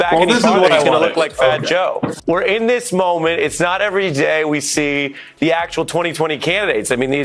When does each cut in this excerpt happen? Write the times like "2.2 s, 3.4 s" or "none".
2.2 s